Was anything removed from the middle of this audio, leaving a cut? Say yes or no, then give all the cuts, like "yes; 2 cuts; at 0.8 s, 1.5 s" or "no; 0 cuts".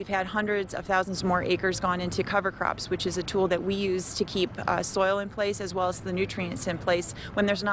no; 0 cuts